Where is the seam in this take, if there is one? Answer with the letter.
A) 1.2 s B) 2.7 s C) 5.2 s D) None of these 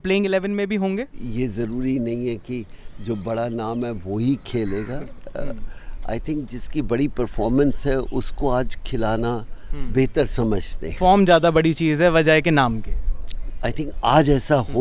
A